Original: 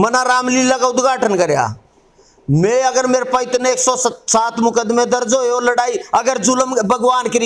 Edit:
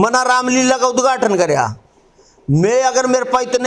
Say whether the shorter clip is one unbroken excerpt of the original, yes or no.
yes